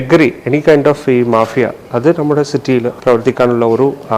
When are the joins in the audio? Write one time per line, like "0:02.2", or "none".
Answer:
0:02.9